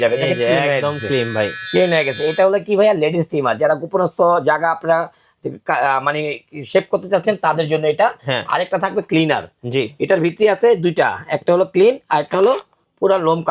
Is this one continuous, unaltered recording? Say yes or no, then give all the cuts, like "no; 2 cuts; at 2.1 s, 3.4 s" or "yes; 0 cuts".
yes; 0 cuts